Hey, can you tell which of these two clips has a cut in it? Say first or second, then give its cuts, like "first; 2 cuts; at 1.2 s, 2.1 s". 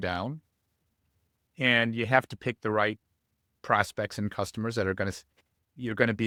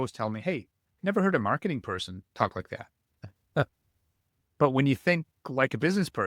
second; 1 cut; at 2.2 s